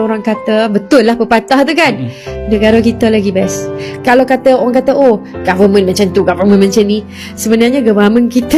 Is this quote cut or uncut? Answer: uncut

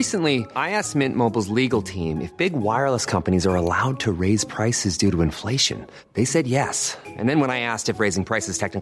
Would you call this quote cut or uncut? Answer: uncut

